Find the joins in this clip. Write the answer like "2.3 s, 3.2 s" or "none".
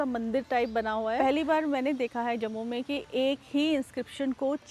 1.2 s